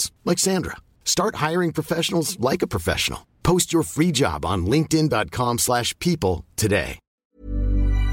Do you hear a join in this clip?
yes; 1 cut; at 7.1 s

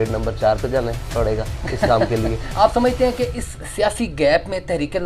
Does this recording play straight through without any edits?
no; 1 cut; at 2.4 s

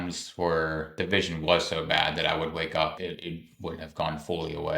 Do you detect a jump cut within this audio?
yes; 2 cuts; at 1.0 s, 3.0 s

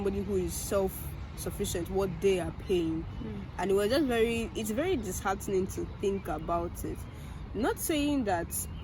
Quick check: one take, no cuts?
yes; 0 cuts

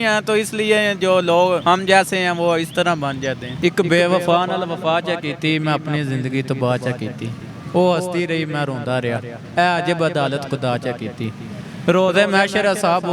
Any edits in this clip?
yes; 2 cuts; at 1.6 s, 3.5 s

